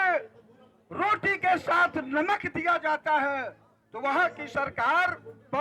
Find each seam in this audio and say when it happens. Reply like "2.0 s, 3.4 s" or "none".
none

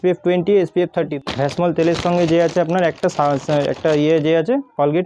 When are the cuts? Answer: 1.1 s

